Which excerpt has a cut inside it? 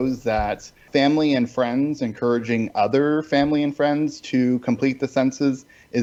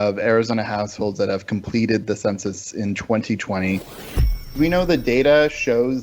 second; 1 cut; at 4.1 s

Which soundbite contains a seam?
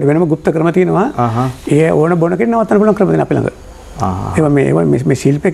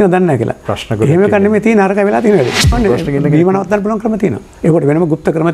second; 1 cut; at 2.8 s

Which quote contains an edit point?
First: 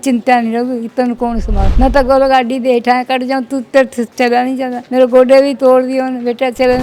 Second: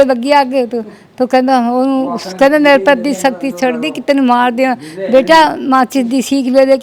first; 2 cuts; at 1.6 s, 4.8 s

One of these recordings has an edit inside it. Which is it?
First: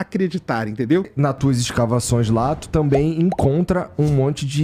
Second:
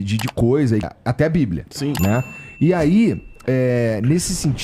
first; 1 cut; at 1.1 s

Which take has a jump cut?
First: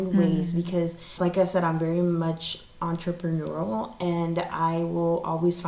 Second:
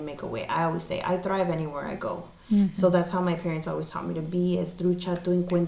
first; 1 cut; at 1.1 s

